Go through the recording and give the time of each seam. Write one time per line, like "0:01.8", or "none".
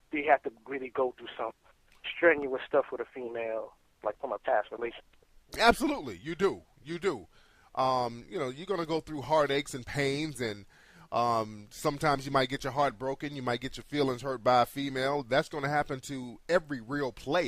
0:13.4